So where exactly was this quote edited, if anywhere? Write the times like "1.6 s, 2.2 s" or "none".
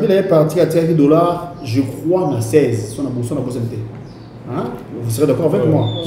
none